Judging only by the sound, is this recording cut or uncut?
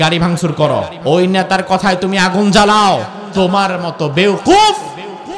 cut